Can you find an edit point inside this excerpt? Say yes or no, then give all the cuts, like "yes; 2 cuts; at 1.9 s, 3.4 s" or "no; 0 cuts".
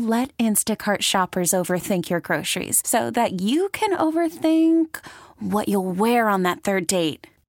no; 0 cuts